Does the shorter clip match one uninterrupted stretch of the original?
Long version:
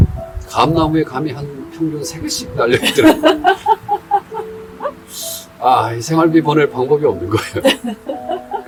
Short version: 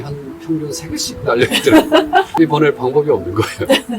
no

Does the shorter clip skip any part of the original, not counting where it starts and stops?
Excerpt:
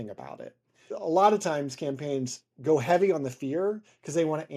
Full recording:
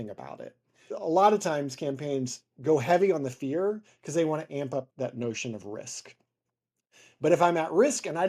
no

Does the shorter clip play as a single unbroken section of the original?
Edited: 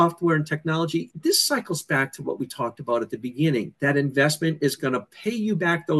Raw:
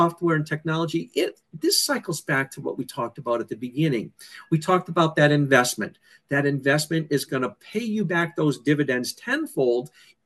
no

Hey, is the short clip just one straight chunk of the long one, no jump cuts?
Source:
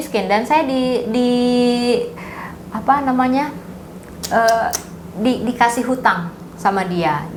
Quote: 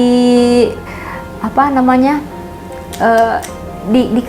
yes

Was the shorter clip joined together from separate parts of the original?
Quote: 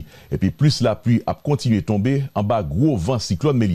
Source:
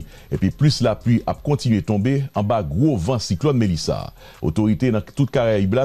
no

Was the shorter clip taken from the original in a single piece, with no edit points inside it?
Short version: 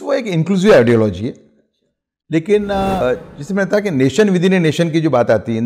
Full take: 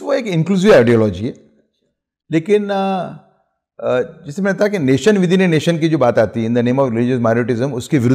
no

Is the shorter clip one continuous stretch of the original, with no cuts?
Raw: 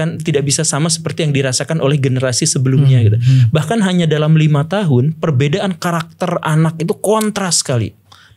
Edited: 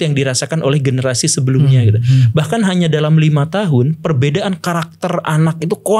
yes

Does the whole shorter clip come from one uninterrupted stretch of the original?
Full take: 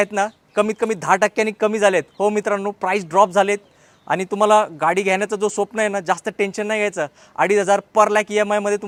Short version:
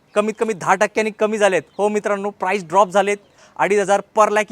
no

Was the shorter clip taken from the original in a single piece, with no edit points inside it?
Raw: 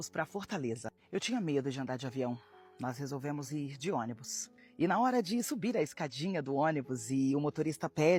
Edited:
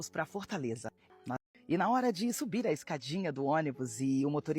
no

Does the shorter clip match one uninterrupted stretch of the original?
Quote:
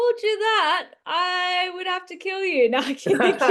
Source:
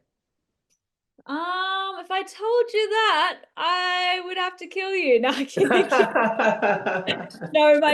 yes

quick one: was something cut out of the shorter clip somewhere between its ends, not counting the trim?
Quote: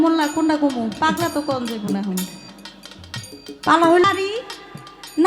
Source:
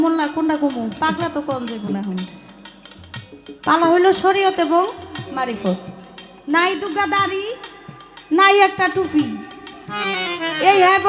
yes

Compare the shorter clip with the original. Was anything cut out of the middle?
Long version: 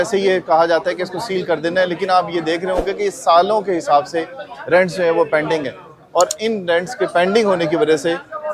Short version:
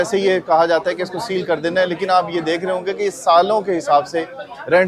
no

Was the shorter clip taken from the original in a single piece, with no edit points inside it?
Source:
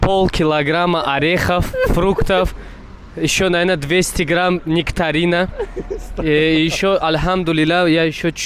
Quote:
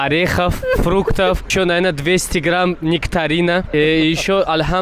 no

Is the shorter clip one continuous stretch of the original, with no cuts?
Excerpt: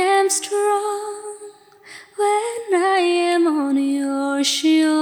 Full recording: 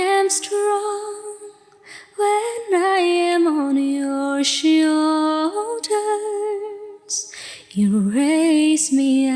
yes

